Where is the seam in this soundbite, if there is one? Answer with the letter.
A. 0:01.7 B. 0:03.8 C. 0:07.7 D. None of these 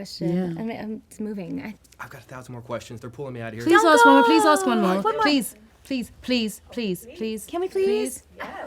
A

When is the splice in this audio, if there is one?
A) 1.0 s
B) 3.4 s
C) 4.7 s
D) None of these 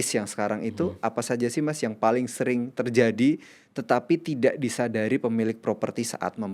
D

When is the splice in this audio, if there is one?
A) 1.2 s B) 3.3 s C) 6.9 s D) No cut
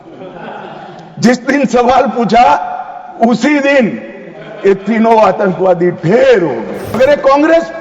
C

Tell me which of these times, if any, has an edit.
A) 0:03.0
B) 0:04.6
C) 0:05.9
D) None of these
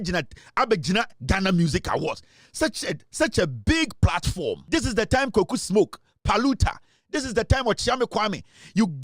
B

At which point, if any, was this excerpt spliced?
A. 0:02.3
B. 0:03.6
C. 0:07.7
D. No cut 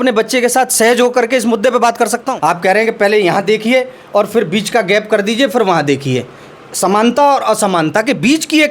A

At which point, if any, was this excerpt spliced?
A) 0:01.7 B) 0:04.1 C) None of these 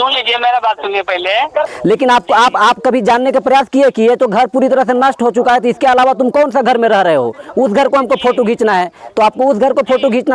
A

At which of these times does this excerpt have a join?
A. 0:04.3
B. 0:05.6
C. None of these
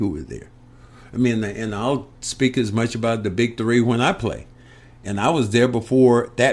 C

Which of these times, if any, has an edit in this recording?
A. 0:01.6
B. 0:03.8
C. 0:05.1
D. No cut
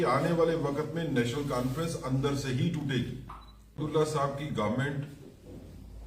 B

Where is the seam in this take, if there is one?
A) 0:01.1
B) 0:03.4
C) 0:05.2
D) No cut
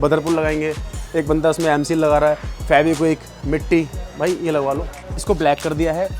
C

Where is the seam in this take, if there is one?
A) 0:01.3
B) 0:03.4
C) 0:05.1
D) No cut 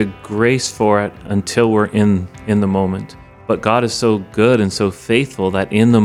B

